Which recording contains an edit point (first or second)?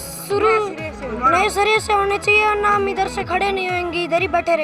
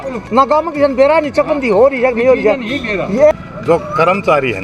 second